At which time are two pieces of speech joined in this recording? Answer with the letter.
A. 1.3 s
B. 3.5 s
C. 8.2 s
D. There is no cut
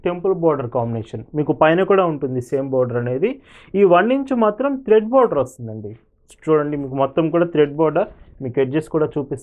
D